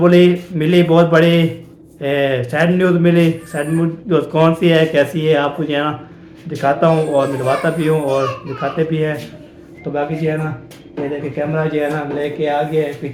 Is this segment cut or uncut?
uncut